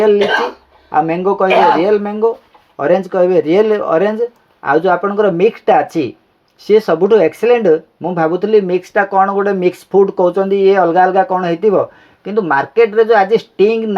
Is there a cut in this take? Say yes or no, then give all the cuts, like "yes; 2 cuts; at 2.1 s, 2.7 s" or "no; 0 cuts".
no; 0 cuts